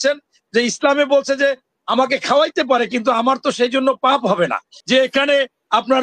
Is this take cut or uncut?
cut